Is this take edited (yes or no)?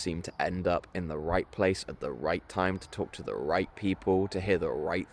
no